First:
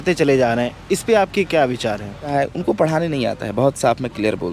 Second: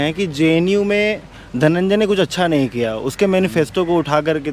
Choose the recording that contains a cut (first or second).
first